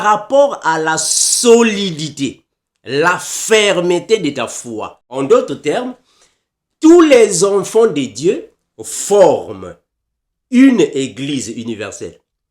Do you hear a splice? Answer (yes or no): yes